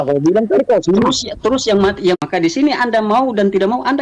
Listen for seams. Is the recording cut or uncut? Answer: cut